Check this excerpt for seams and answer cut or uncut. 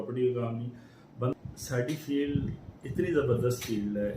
cut